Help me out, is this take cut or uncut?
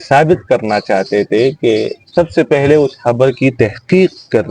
cut